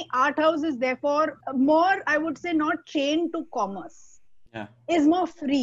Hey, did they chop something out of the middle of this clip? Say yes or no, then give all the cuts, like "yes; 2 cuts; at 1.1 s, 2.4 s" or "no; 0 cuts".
yes; 1 cut; at 1.4 s